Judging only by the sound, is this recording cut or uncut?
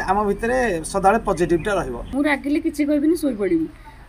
cut